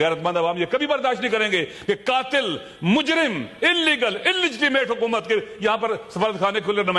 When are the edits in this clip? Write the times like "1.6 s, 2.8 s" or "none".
none